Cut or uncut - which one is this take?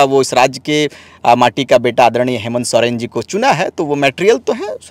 uncut